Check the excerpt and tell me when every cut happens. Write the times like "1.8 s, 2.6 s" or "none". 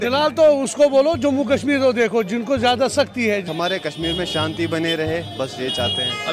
3.4 s